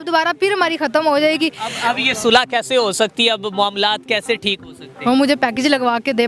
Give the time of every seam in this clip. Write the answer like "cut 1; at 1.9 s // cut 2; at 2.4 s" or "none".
none